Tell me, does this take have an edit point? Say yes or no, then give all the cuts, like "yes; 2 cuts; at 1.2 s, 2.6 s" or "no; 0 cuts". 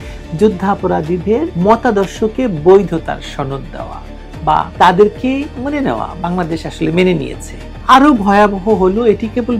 no; 0 cuts